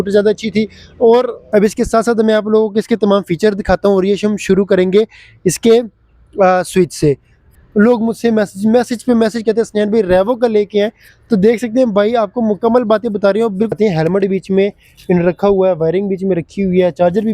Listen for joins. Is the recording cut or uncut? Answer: cut